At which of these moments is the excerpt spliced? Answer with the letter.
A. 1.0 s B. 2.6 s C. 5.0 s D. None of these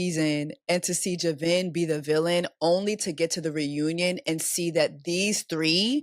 D